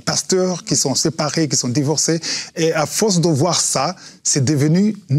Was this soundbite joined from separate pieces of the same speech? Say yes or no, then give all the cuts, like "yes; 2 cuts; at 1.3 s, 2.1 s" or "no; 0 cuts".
no; 0 cuts